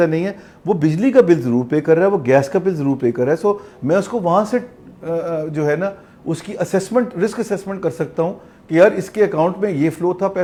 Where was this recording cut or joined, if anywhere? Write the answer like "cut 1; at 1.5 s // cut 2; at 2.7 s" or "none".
none